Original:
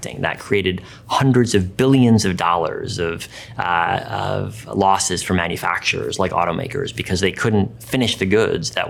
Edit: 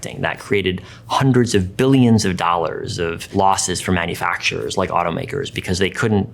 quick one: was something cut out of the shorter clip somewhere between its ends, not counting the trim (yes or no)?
yes